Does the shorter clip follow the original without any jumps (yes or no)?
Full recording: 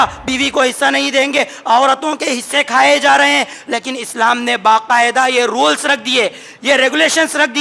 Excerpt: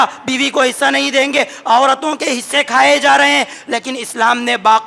yes